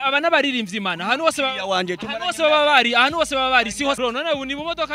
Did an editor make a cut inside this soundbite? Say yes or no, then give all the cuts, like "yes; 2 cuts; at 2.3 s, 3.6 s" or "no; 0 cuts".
yes; 1 cut; at 4.0 s